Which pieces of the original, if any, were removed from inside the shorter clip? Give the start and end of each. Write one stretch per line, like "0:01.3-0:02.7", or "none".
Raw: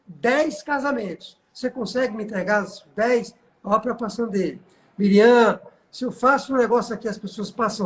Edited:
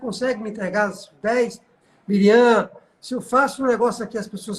0:03.5-0:04.7